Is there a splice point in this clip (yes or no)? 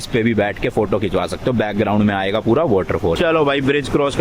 yes